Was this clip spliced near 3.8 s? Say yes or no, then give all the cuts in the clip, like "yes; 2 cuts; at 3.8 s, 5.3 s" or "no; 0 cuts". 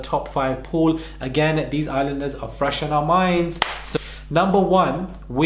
yes; 1 cut; at 3.8 s